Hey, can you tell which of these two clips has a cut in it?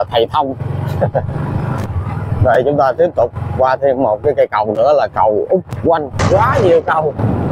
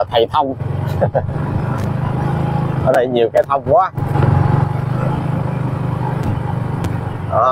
first; 2 cuts; at 1.9 s, 6.2 s

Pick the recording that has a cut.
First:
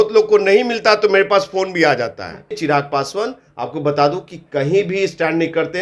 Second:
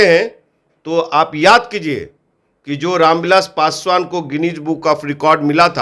first; 1 cut; at 2.6 s

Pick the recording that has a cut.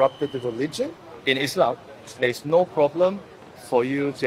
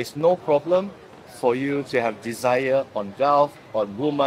first; 1 cut; at 1.0 s

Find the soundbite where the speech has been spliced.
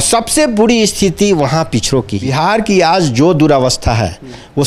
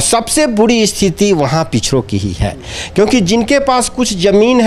first; 1 cut; at 2.3 s

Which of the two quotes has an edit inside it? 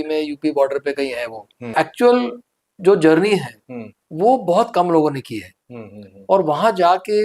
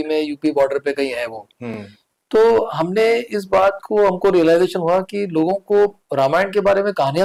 first; 1 cut; at 1.7 s

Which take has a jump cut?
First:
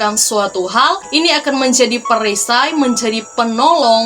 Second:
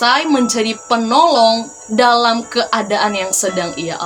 first; 1 cut; at 1.0 s

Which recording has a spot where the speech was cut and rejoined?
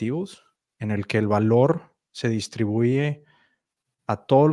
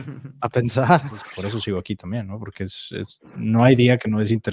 second; 1 cut; at 1.2 s

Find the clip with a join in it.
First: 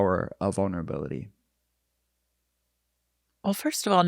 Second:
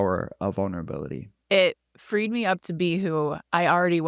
second; 1 cut; at 1.4 s

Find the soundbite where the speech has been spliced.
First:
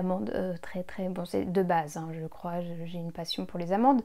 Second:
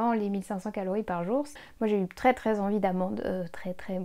second; 1 cut; at 1.6 s

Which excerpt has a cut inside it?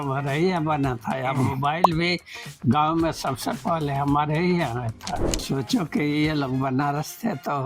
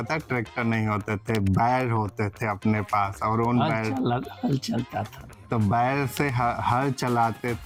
first; 1 cut; at 5.3 s

